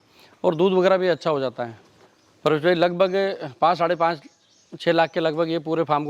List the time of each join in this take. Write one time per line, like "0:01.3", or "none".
0:01.7